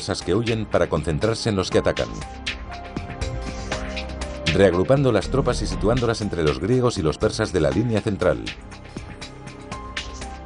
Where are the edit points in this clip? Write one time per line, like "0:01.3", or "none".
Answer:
none